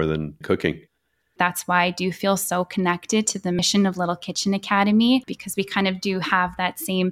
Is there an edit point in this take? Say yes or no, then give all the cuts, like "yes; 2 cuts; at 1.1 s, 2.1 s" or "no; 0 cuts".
yes; 1 cut; at 1.3 s